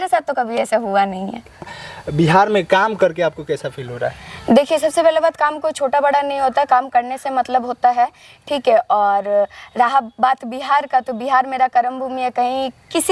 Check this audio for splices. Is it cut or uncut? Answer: cut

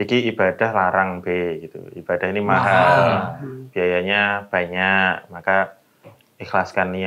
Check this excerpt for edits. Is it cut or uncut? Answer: uncut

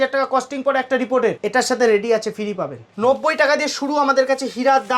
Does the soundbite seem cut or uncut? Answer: cut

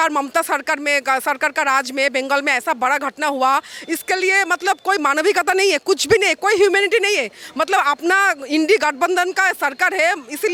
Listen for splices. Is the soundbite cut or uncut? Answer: uncut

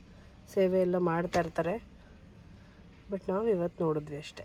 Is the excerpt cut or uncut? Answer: uncut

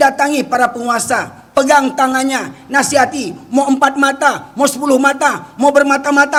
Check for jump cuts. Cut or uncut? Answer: uncut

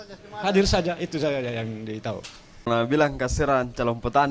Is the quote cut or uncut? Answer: cut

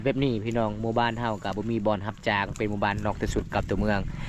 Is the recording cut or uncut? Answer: uncut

